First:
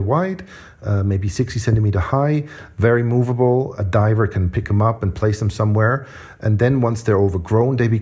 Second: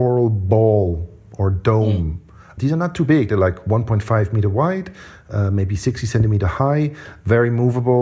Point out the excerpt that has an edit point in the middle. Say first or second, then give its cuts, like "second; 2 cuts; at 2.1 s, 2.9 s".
first; 1 cut; at 6.2 s